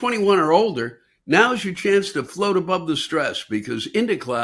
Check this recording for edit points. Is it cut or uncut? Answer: uncut